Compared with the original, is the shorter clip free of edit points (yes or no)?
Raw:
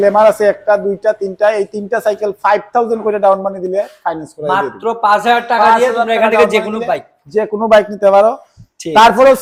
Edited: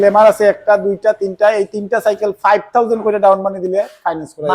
yes